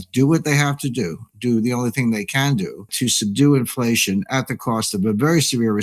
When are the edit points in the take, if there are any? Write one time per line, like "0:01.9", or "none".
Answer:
0:02.9

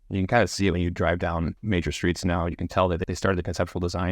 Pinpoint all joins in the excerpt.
0:01.6
0:03.0

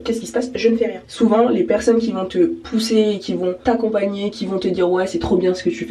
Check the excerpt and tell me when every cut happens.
0:01.0
0:02.6
0:03.6

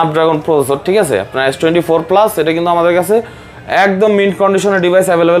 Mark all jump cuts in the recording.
none

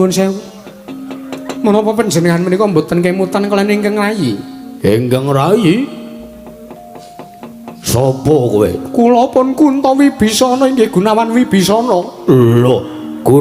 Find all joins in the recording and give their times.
none

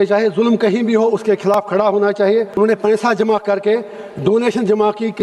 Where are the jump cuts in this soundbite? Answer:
0:02.6

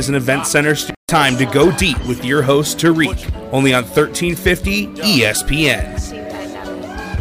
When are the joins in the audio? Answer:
0:00.9

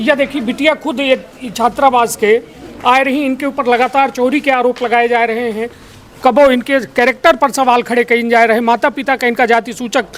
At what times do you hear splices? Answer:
none

